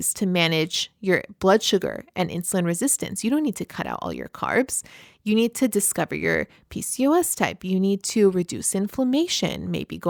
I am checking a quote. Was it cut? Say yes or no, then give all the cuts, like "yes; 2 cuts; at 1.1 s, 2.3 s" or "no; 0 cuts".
no; 0 cuts